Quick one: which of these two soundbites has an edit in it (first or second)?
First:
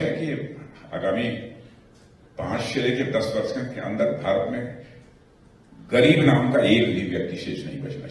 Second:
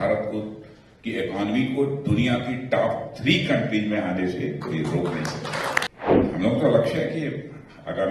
second